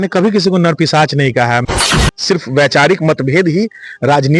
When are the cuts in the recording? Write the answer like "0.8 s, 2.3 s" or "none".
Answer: 1.8 s